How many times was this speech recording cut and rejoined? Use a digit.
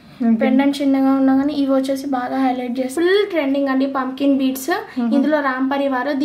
1